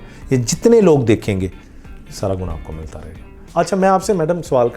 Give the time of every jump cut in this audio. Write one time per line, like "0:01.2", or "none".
0:03.4